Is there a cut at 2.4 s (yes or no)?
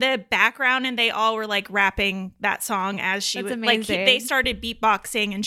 no